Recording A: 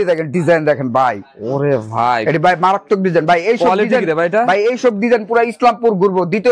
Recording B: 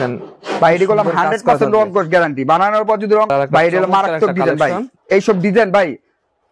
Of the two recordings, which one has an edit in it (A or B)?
B